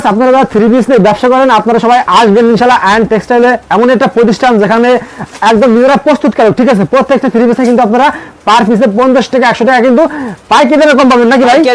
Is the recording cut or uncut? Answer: uncut